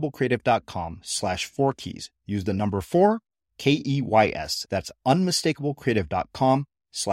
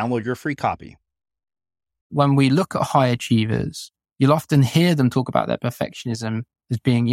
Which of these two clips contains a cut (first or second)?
second